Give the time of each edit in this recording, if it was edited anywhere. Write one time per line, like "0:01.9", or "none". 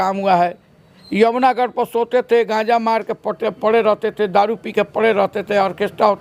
none